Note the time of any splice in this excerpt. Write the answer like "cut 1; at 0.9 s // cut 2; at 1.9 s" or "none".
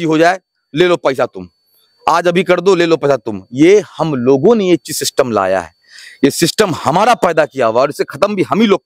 none